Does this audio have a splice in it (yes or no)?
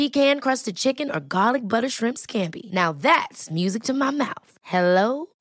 no